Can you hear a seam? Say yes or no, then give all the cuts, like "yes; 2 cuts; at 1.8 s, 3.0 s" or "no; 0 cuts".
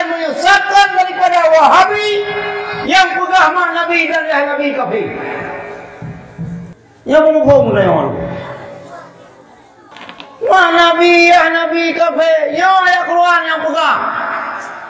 yes; 2 cuts; at 6.7 s, 9.9 s